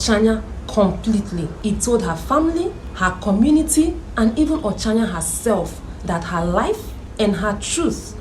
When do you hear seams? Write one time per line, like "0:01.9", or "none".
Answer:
0:01.5
0:02.9
0:07.0